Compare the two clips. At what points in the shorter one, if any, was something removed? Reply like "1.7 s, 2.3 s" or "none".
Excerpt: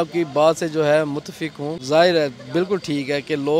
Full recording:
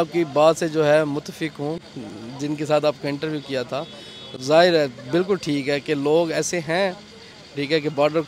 1.7 s